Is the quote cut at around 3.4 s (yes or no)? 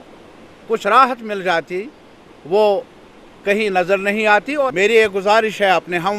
no